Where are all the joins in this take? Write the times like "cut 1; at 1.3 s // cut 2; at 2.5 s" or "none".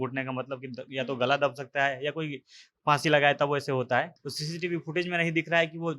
cut 1; at 4.1 s